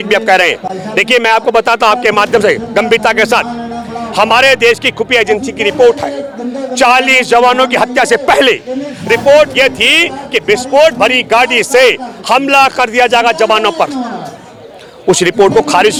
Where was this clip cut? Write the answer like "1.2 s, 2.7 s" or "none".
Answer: none